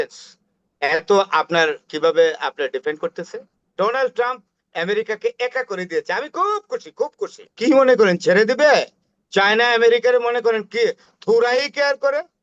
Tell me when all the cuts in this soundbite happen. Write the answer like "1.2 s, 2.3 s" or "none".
3.7 s, 7.5 s

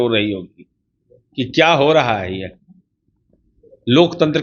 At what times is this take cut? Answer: none

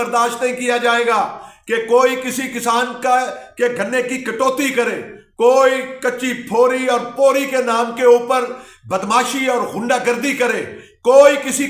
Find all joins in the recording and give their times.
none

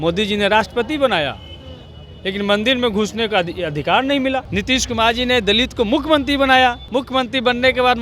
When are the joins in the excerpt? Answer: 4.5 s, 6.8 s

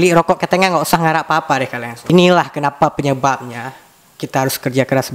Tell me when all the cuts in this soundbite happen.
none

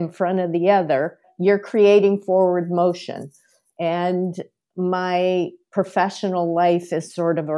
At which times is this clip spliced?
none

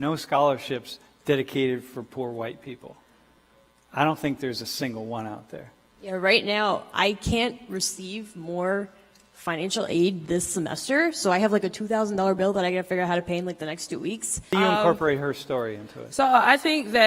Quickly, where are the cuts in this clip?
14.5 s

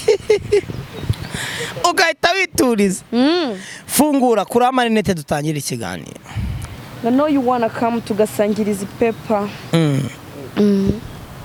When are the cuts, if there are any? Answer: none

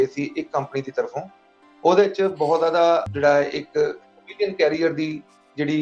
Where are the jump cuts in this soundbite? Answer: 3.1 s

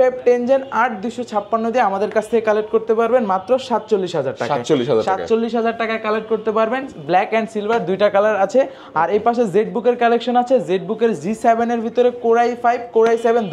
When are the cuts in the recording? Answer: none

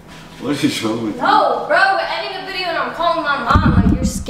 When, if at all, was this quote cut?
none

